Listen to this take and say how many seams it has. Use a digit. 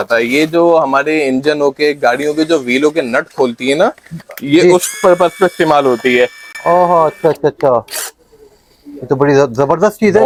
0